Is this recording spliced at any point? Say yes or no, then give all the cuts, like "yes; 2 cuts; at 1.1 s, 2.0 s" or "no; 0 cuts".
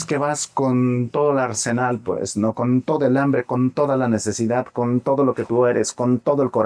no; 0 cuts